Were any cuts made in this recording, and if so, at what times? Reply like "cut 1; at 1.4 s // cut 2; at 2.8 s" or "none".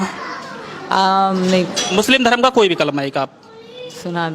cut 1; at 1.8 s